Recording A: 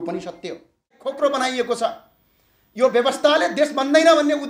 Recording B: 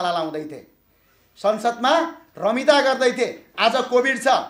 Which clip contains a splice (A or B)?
A